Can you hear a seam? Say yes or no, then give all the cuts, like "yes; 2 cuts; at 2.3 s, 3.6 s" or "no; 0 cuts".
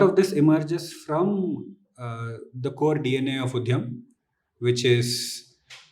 no; 0 cuts